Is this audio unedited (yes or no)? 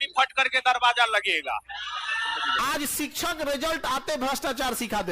no